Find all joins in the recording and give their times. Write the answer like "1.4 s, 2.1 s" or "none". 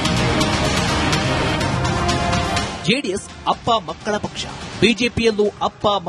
0.9 s